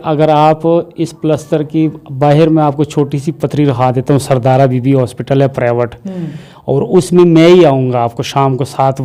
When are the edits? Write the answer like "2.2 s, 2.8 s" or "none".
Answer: none